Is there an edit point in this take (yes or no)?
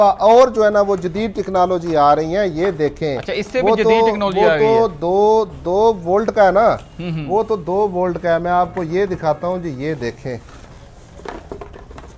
no